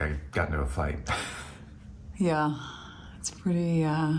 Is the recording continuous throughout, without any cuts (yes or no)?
yes